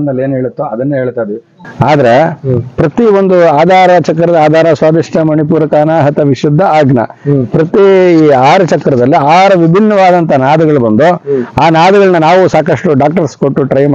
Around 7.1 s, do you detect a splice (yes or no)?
no